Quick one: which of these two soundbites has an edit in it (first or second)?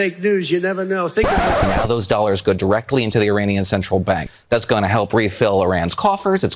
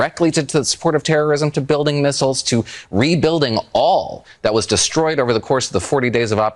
first